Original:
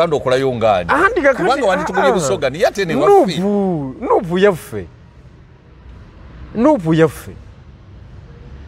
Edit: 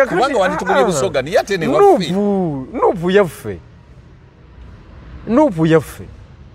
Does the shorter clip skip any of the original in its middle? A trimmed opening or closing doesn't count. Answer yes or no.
no